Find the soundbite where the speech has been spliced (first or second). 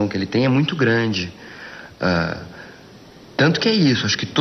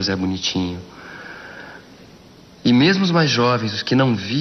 second